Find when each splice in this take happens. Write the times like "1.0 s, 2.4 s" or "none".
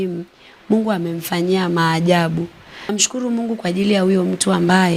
2.9 s